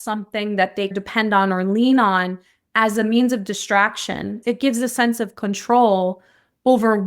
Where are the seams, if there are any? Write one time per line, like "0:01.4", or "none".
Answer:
0:01.0
0:04.4